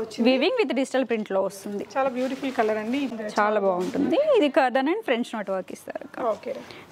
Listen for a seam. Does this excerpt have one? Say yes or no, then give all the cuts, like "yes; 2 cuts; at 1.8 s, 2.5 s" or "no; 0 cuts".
yes; 1 cut; at 3.1 s